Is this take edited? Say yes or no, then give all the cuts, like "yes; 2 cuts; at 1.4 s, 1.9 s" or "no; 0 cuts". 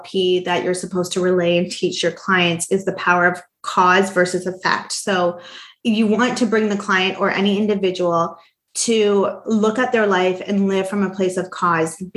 yes; 1 cut; at 5.7 s